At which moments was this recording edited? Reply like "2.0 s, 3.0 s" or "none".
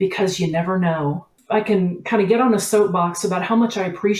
1.3 s